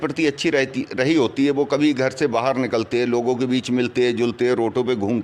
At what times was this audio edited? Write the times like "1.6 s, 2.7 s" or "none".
3.4 s